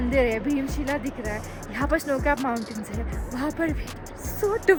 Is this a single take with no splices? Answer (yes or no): yes